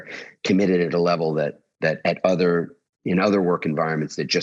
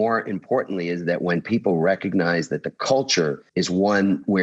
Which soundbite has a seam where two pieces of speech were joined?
second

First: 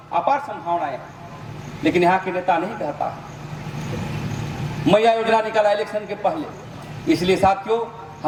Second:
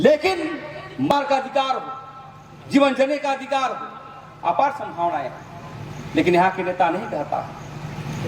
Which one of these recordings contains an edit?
second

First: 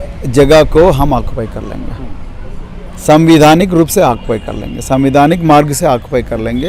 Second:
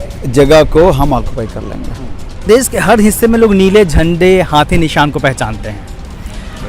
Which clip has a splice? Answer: second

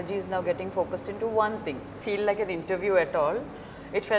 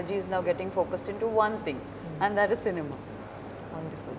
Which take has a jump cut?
first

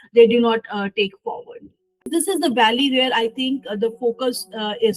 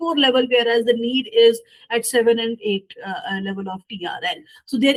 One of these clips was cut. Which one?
first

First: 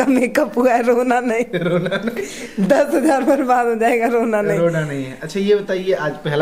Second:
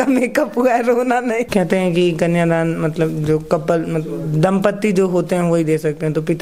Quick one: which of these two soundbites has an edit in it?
second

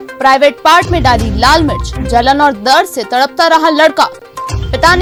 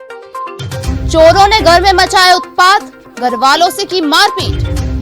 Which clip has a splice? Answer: second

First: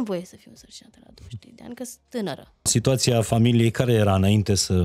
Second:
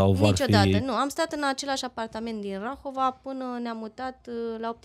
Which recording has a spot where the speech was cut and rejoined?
first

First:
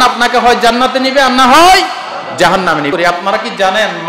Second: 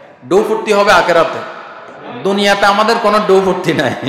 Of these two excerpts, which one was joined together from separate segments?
first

